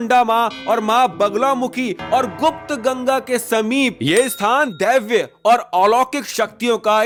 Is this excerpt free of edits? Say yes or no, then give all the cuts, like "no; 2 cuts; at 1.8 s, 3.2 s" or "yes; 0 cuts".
yes; 0 cuts